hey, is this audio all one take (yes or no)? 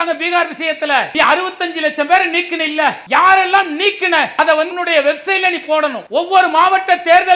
no